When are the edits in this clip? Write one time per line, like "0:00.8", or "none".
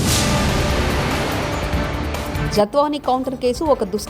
0:02.3